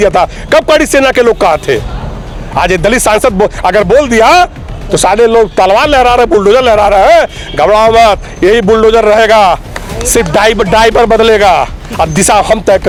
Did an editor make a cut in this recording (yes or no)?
no